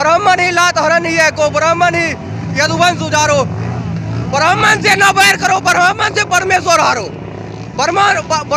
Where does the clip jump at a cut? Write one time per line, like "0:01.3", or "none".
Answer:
none